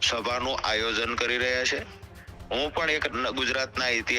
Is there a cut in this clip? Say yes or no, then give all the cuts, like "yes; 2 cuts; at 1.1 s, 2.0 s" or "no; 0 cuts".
no; 0 cuts